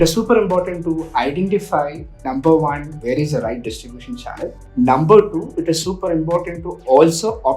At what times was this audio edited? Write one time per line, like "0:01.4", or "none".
0:02.9
0:04.6